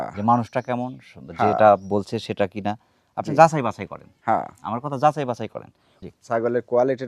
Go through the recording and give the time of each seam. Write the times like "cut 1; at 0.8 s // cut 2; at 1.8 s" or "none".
cut 1; at 5.9 s